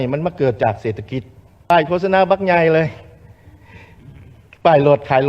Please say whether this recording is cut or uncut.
cut